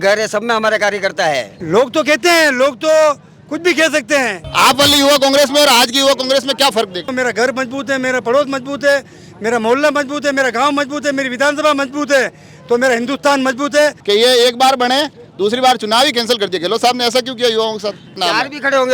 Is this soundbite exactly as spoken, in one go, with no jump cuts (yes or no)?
no